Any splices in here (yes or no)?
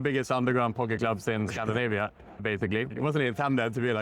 yes